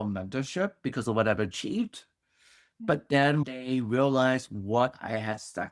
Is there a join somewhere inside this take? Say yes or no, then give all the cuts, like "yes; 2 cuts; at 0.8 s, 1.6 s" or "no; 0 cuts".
yes; 1 cut; at 3.4 s